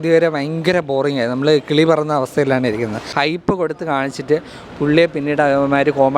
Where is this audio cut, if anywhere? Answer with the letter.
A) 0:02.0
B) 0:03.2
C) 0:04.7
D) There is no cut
B